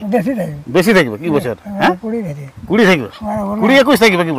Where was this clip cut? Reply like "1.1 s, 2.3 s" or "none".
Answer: none